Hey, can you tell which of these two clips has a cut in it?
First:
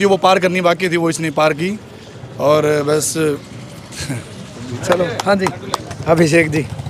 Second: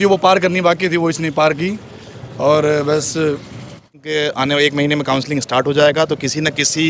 second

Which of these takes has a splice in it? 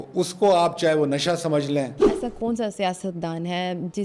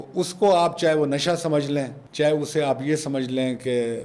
first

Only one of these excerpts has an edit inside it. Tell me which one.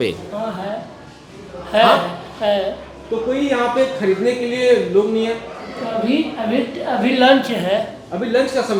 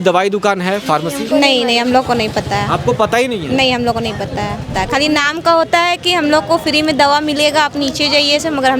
second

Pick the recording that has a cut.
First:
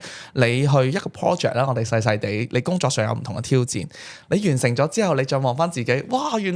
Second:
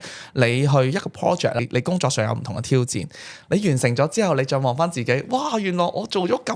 second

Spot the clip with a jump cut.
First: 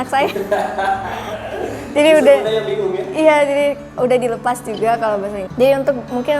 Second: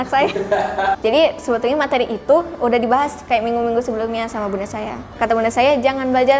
second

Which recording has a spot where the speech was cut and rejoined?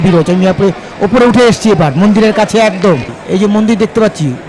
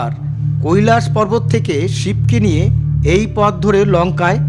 first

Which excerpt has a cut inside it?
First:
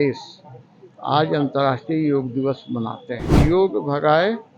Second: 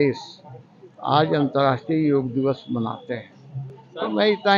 first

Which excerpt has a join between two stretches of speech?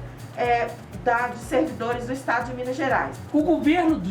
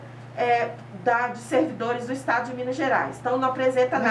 first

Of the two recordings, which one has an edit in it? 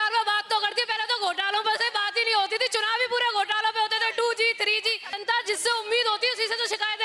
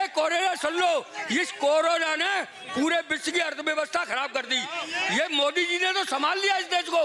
first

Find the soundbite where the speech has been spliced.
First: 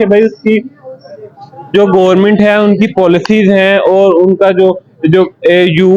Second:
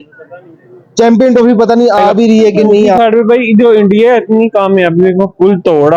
second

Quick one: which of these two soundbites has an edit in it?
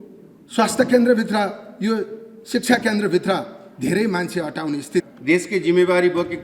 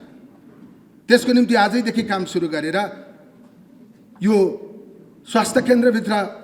first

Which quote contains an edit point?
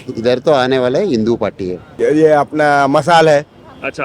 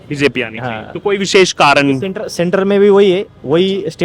first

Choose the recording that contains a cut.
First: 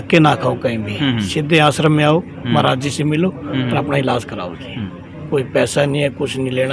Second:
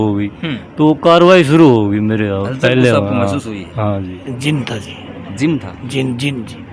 second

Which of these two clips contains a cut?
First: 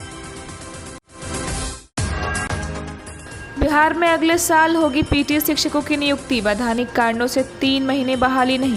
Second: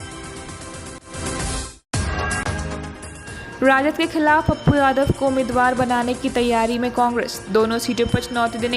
second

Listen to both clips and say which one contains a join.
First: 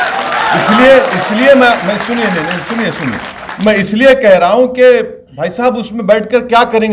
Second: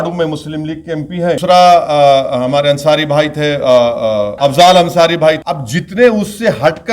second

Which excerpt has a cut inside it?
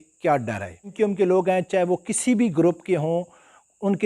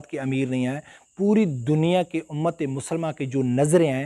first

